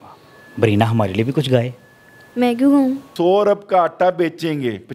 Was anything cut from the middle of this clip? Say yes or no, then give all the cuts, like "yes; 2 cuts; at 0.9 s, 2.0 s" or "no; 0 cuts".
yes; 1 cut; at 3.1 s